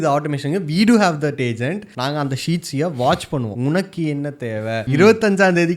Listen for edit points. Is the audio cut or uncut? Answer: cut